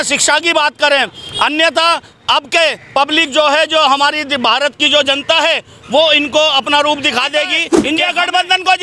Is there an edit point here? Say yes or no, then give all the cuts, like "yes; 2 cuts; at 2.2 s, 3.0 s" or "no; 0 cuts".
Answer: yes; 1 cut; at 7.7 s